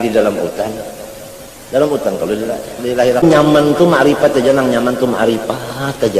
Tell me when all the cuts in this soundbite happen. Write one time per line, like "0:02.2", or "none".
0:03.2